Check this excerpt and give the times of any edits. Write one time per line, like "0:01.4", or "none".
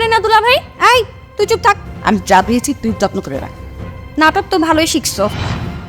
0:01.9